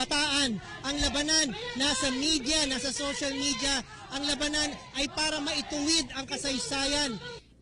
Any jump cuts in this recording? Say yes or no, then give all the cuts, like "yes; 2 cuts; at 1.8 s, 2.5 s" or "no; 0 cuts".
yes; 1 cut; at 2.8 s